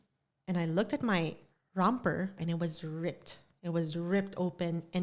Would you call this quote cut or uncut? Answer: uncut